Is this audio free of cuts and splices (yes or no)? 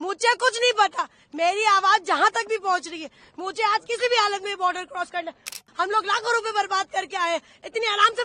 no